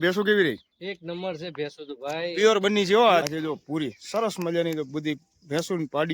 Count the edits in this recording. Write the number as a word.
one